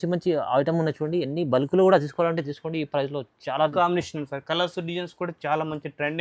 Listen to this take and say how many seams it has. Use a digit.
1